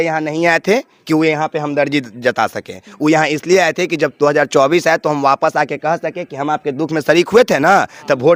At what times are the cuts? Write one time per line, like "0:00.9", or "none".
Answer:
none